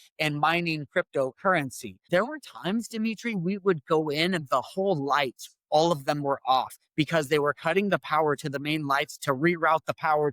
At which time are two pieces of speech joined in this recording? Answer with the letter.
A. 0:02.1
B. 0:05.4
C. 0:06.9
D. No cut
A